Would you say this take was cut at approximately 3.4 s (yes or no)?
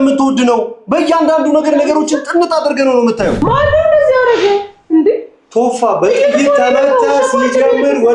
yes